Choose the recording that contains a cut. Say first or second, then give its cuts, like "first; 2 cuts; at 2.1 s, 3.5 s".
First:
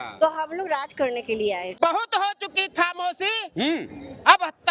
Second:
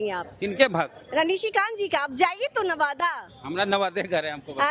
first; 1 cut; at 1.8 s